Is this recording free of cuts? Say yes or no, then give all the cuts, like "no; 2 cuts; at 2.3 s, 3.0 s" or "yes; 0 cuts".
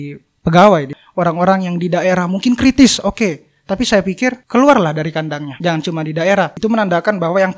no; 4 cuts; at 1.0 s, 4.4 s, 5.5 s, 6.5 s